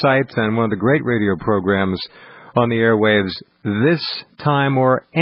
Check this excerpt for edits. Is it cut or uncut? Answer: uncut